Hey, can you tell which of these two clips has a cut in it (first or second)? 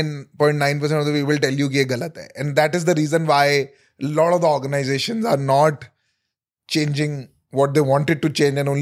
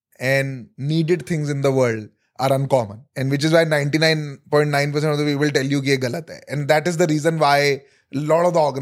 second